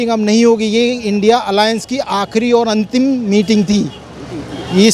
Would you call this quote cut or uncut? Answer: uncut